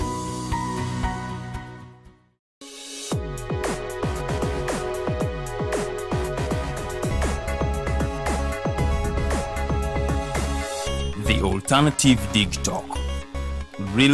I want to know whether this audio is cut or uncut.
cut